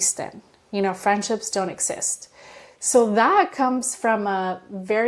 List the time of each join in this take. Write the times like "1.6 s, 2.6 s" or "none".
none